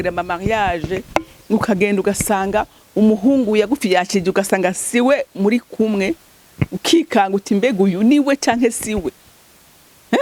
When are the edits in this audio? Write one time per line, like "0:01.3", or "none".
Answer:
none